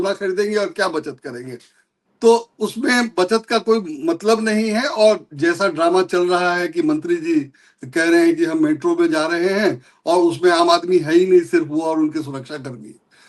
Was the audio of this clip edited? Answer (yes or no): no